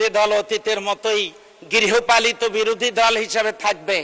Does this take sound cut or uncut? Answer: uncut